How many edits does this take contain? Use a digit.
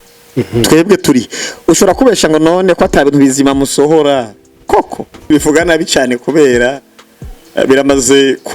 1